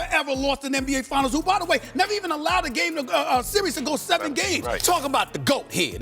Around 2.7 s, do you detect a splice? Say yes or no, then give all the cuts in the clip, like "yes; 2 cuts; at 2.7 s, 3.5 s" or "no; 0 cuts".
no; 1 cut; at 4.8 s